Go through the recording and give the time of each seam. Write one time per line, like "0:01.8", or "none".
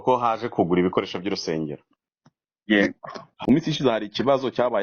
0:03.3